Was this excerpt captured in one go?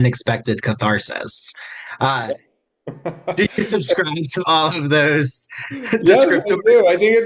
yes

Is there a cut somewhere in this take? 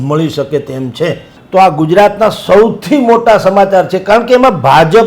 yes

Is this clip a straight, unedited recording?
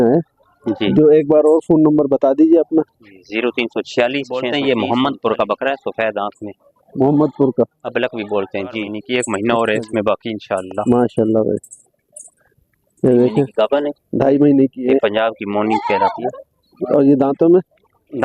no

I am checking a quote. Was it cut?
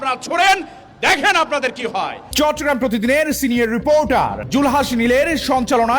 no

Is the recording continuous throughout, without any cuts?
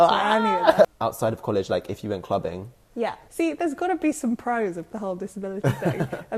no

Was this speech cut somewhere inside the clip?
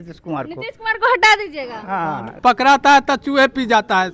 yes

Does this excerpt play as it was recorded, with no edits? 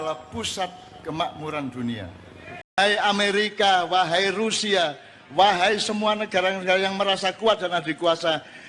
no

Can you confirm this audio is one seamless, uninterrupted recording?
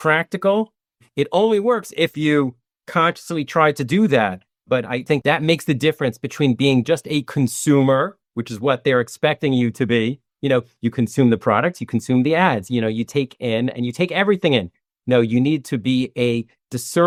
yes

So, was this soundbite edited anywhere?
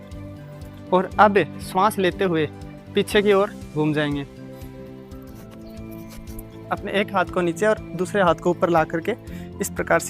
yes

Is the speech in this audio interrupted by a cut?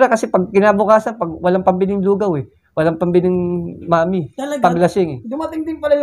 no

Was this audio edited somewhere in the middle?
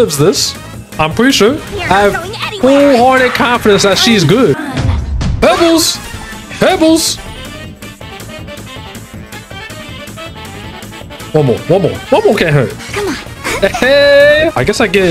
no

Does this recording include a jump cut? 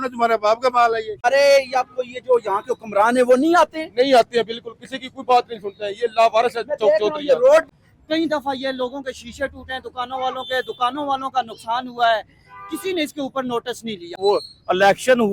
yes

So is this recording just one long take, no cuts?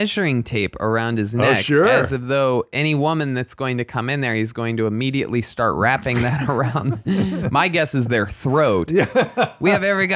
yes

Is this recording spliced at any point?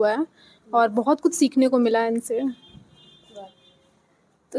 no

